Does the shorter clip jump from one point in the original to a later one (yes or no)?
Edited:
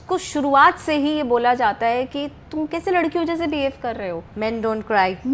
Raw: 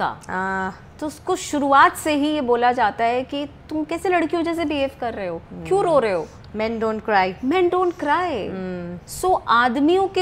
yes